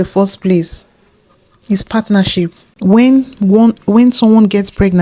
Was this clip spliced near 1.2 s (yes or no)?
no